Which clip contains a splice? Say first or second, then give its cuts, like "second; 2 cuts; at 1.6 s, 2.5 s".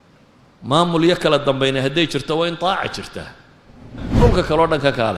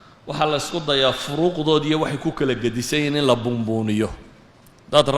first; 1 cut; at 4.0 s